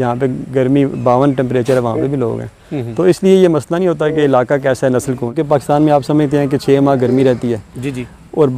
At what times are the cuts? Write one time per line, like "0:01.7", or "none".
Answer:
0:05.4

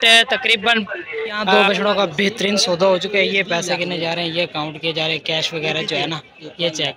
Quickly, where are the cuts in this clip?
0:01.5

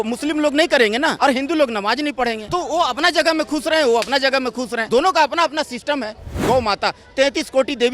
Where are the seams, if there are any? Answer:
0:01.2
0:02.4
0:04.8
0:06.4

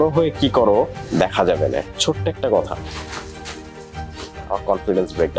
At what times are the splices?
none

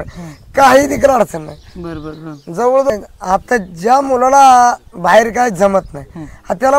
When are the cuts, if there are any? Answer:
0:02.9

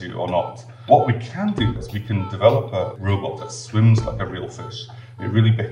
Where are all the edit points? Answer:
0:00.9
0:01.7
0:03.3

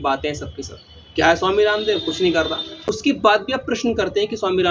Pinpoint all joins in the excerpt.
0:02.7

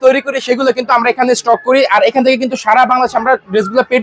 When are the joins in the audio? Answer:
none

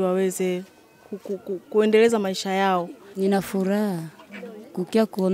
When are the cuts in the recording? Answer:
0:03.0

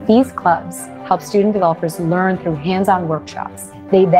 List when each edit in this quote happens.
none

